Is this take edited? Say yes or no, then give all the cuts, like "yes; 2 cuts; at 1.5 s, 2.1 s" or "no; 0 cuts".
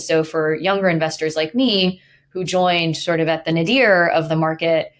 no; 0 cuts